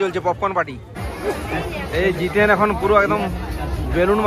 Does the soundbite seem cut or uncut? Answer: cut